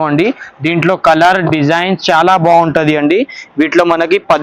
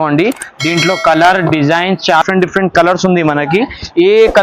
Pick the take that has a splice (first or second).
second